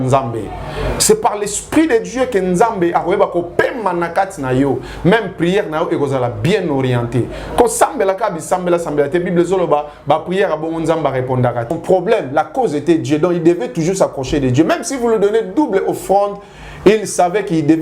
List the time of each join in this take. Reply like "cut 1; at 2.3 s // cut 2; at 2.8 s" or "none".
cut 1; at 11.7 s